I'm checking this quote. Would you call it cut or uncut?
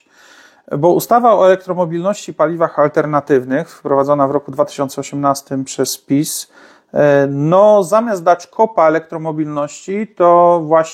uncut